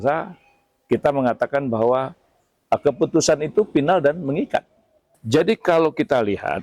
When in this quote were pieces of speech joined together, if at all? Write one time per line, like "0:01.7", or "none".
0:05.2